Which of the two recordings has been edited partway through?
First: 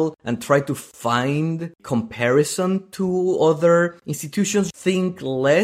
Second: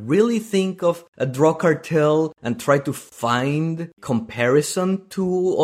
first; 1 cut; at 4.7 s

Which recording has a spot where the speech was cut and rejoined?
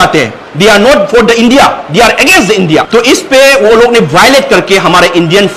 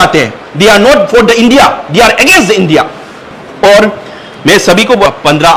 first; 1 cut; at 2.9 s

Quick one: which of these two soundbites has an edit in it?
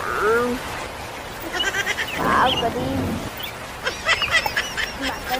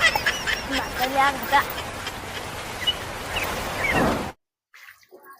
second; 1 cut; at 4.2 s

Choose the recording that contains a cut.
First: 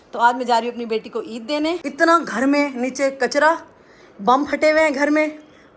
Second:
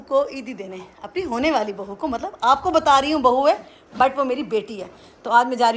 first; 1 cut; at 1.8 s

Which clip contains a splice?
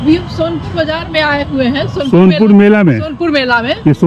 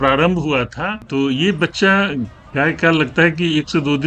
second; 1 cut; at 1.1 s

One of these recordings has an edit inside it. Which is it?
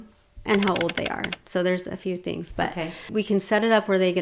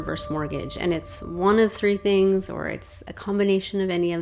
first; 1 cut; at 3.1 s

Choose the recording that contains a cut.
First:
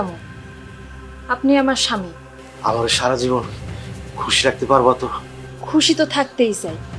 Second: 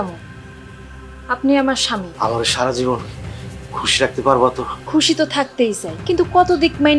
second; 3 cuts; at 2.1 s, 4.7 s, 5.9 s

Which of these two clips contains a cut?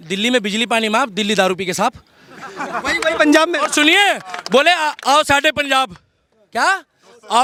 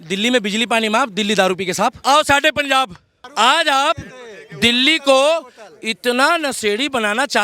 second; 2 cuts; at 2.0 s, 3.2 s

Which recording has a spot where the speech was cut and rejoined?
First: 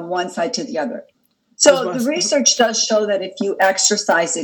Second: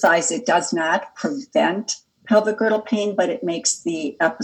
first; 1 cut; at 1.1 s

